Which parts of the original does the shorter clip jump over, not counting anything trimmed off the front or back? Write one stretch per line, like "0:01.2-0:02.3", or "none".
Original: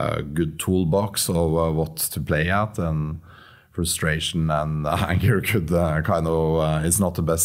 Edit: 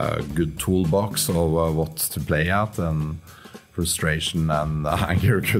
none